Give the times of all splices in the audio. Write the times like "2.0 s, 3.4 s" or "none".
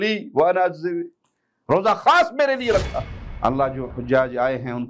3.2 s